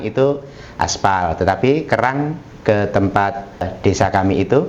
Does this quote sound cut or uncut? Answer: cut